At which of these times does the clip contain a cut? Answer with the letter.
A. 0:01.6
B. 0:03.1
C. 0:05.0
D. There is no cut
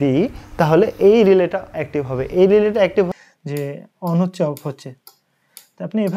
B